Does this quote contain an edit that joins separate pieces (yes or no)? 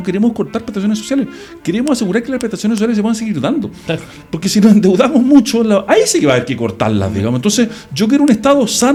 no